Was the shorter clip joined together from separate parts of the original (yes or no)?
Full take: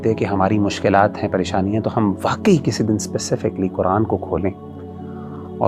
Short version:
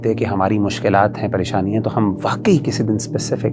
no